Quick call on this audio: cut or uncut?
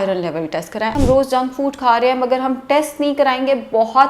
cut